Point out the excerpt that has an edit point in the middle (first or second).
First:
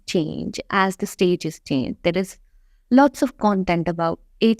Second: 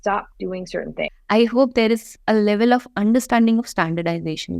second